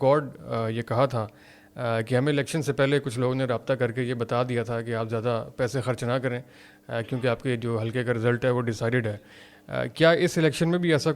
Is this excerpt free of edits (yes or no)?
yes